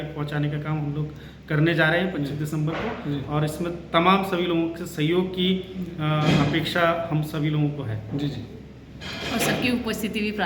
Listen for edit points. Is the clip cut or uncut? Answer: uncut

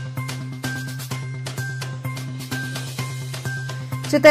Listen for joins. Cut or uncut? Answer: cut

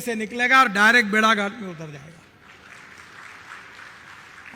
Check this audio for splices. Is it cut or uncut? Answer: uncut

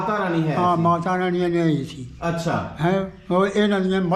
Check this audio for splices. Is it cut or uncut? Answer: uncut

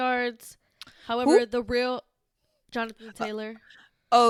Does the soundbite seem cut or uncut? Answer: uncut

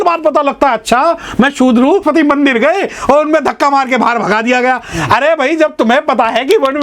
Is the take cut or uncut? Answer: cut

